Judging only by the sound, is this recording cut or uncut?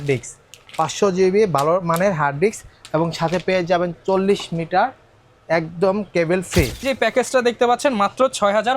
cut